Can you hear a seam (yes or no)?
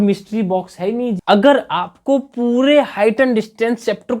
yes